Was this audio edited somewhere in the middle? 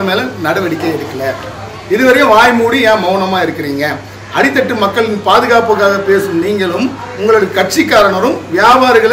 no; 0 cuts

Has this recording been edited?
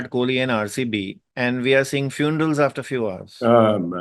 yes; 1 cut; at 1.2 s

